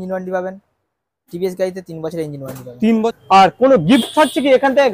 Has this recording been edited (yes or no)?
yes